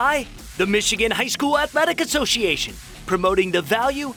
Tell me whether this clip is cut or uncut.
uncut